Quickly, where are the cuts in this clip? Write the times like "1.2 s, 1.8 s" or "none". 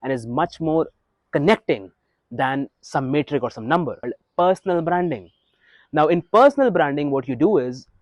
4.1 s